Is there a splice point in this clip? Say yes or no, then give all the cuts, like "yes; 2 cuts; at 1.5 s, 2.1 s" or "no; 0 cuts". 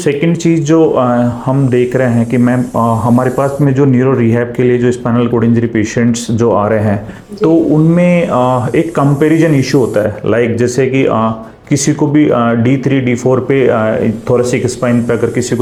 no; 0 cuts